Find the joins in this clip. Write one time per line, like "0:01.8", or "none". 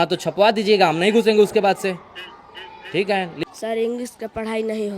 0:03.4